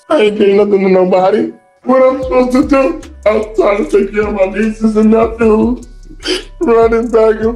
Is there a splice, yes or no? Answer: yes